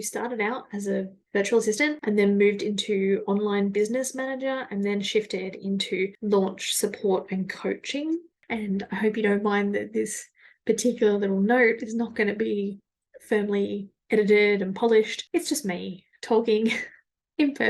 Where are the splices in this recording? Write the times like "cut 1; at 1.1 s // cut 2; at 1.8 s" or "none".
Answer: cut 1; at 8.5 s